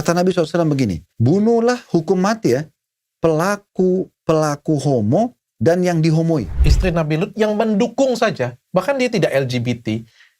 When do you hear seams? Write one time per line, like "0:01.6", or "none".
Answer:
0:01.1
0:06.6